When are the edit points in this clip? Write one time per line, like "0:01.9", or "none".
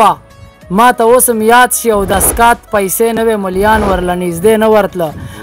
none